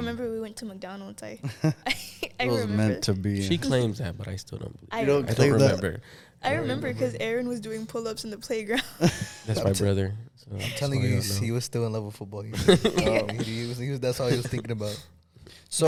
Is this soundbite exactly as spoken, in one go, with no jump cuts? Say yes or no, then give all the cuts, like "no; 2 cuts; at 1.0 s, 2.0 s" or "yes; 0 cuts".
yes; 0 cuts